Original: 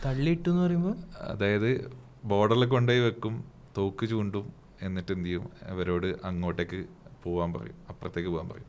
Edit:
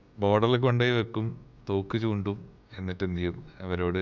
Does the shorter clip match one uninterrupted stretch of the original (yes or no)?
yes